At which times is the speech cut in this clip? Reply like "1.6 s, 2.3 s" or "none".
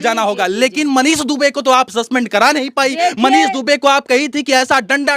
none